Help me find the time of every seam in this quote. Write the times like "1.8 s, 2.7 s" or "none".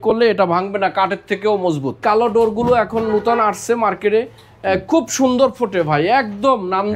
2.0 s